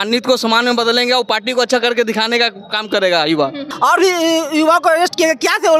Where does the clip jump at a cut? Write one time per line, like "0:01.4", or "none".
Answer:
0:03.7